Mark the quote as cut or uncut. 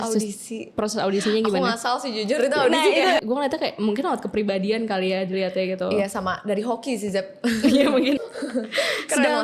cut